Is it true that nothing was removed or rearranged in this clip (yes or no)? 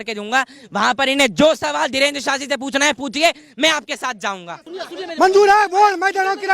no